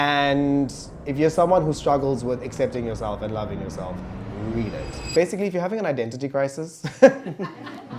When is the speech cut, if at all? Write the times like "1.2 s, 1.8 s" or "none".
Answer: 4.9 s